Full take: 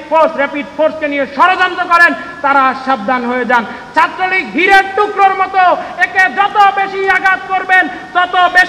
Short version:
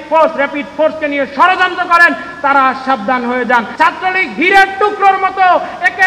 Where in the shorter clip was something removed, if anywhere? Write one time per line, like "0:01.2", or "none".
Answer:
0:03.7